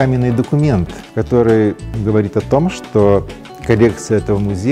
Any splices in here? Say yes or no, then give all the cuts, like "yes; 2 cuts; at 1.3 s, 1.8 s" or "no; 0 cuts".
yes; 2 cuts; at 1.0 s, 1.9 s